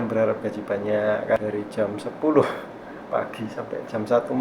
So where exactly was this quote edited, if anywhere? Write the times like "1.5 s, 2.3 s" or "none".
1.4 s